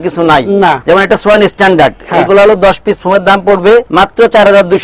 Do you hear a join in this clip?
yes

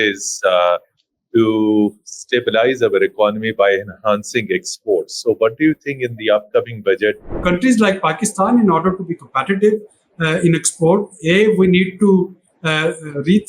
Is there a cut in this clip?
yes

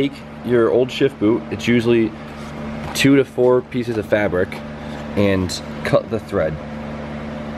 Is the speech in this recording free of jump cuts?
yes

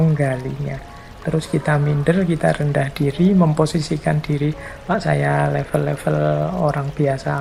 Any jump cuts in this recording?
no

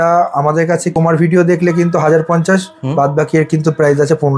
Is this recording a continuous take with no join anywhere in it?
no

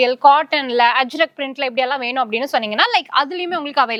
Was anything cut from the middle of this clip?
no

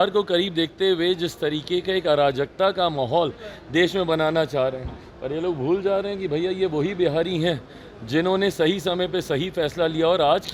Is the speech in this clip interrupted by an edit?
no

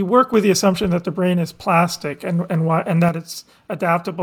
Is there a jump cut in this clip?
no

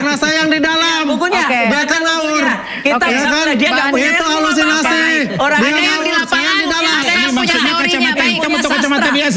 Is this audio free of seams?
yes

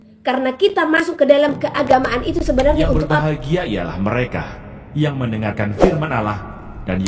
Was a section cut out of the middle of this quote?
yes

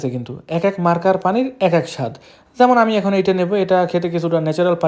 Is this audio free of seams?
yes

